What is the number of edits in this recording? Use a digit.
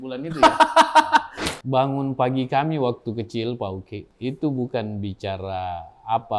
2